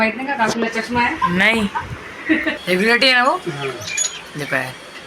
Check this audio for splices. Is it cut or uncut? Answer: cut